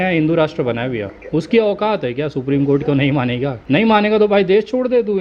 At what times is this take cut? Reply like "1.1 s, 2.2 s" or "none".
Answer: 1.2 s, 3.6 s